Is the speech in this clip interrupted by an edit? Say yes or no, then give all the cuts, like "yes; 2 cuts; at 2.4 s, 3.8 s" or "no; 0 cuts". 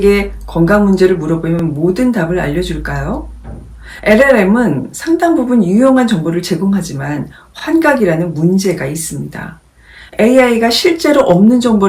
no; 0 cuts